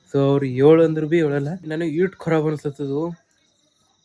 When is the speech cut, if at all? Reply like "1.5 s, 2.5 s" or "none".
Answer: 1.7 s

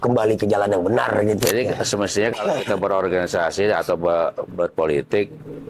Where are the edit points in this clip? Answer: 1.4 s

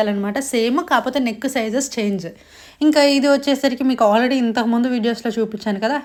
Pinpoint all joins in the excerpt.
none

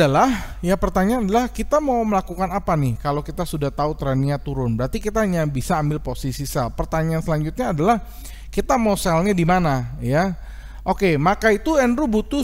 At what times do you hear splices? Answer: none

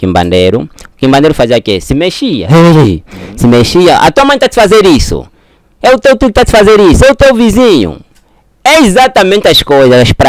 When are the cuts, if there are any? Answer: none

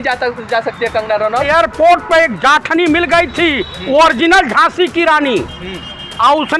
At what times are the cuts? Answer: 1.5 s

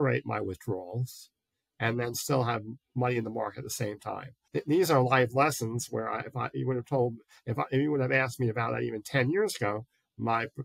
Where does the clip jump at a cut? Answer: 4.4 s

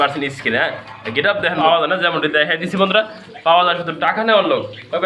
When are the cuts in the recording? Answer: 1.6 s

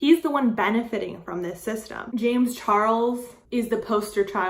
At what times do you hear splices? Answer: 2.0 s, 3.3 s

